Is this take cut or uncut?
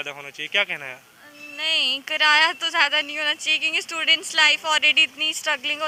uncut